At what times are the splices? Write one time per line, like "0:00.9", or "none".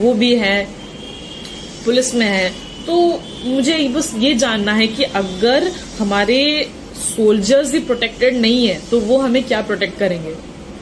none